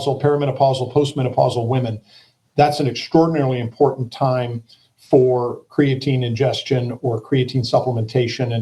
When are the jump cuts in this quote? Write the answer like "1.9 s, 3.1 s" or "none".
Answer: none